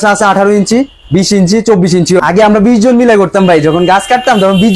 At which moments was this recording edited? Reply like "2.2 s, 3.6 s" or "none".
2.2 s